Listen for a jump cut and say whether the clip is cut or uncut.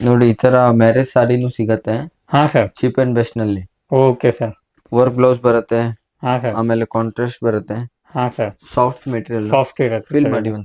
uncut